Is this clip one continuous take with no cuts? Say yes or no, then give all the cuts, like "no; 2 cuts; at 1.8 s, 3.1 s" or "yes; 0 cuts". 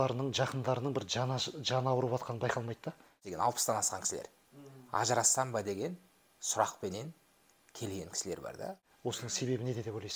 no; 2 cuts; at 3.2 s, 8.8 s